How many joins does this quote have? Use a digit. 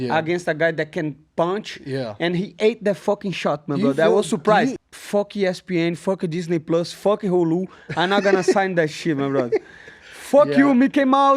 1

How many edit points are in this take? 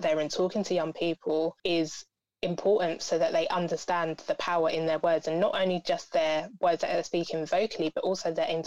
1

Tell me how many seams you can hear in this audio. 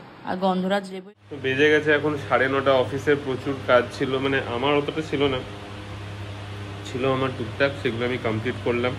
1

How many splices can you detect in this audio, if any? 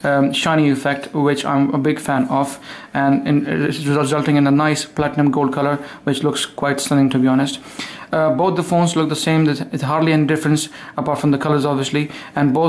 1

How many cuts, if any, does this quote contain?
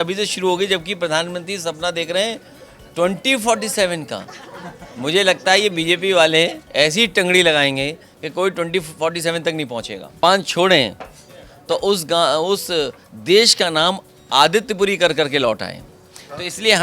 1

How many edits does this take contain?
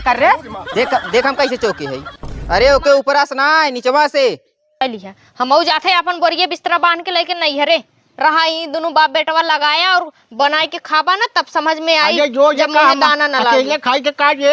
1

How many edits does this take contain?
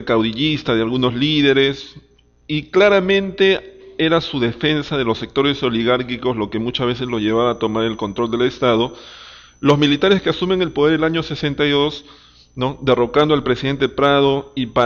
0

